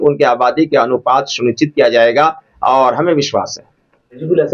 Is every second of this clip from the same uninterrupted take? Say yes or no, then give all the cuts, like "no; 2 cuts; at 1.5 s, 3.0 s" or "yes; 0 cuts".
yes; 0 cuts